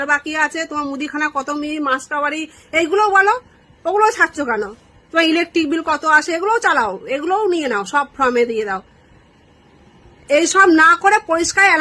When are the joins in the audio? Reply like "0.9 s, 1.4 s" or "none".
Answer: none